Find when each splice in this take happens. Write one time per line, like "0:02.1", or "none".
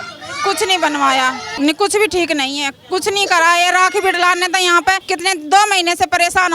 0:01.5
0:05.0